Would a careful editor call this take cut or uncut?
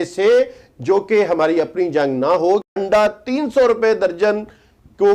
cut